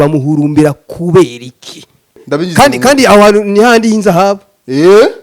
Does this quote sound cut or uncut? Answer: cut